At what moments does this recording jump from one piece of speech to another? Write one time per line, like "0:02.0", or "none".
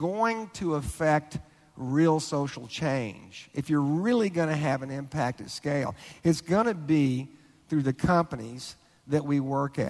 none